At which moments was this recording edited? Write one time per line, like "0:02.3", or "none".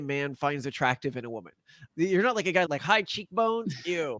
0:02.7